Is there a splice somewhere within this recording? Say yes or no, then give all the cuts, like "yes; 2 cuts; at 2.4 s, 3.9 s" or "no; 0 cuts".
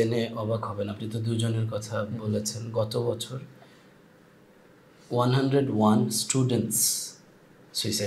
no; 0 cuts